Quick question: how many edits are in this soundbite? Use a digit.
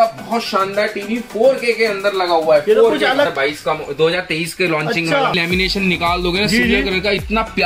2